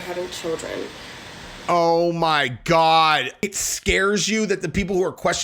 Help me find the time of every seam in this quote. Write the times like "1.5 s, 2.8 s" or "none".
3.5 s